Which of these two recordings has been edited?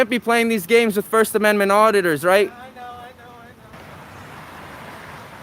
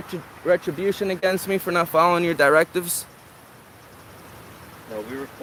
first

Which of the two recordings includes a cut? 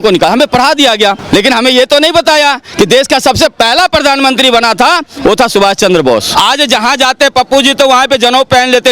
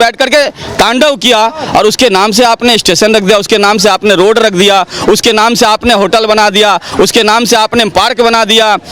first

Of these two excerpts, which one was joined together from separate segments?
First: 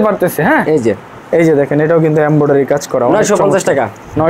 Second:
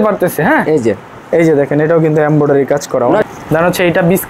second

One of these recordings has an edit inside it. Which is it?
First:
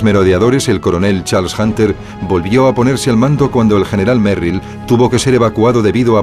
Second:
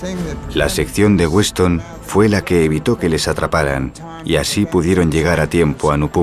first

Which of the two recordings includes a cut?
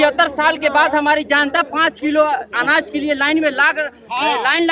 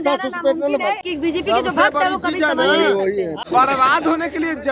second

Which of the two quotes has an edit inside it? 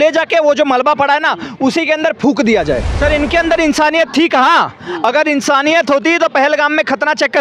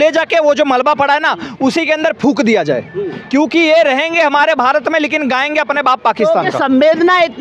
first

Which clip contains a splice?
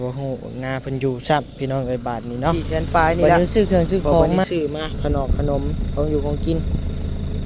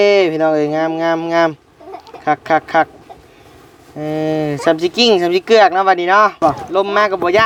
first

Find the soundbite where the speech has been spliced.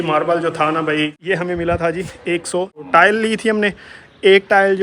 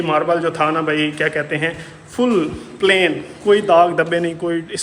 first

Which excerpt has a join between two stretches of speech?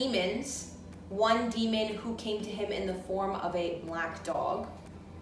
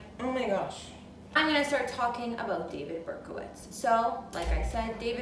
second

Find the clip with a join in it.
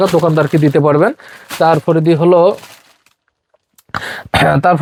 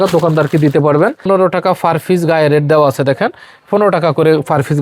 second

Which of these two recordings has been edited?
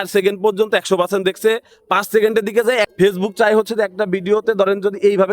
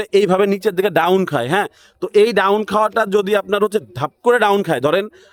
first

